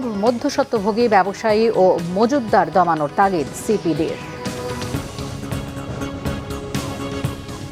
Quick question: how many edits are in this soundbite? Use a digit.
2